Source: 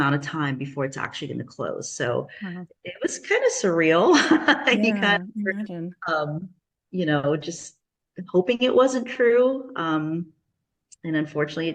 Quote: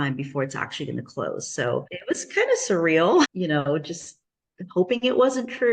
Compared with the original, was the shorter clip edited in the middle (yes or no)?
yes